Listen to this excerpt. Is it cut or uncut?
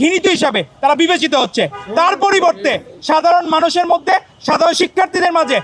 uncut